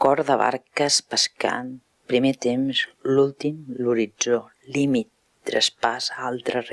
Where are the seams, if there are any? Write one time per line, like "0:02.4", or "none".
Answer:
0:04.6